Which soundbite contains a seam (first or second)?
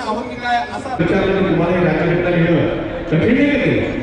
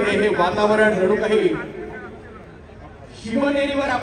first